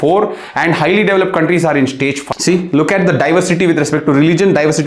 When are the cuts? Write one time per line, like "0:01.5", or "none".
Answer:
0:02.2